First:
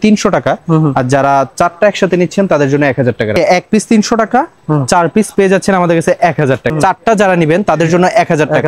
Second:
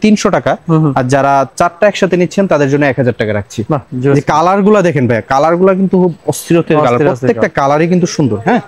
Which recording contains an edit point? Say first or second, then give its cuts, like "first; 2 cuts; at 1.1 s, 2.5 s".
first; 2 cuts; at 3.4 s, 6.7 s